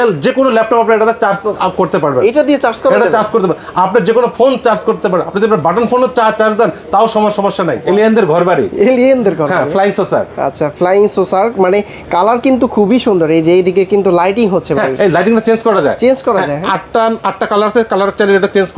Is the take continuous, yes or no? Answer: no